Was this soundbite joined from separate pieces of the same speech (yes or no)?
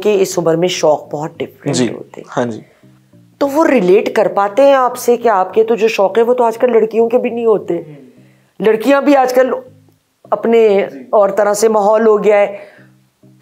no